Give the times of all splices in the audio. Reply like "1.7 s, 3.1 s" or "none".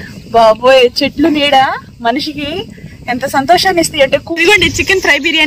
4.2 s